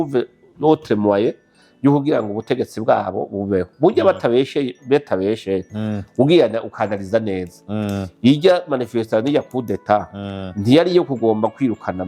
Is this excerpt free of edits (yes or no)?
yes